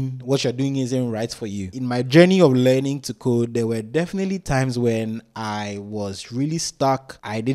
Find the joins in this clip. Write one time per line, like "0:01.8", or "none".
0:01.6